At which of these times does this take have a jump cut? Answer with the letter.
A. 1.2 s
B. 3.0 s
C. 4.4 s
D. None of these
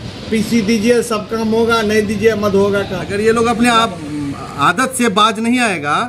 B